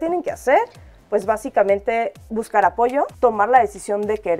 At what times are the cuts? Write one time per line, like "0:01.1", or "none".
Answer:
0:03.1